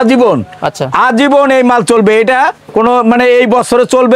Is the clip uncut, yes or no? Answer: yes